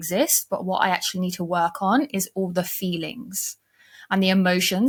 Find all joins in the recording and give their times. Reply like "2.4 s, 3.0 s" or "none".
none